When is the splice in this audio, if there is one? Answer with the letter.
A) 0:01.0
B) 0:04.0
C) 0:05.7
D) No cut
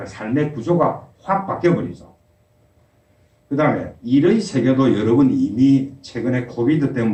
D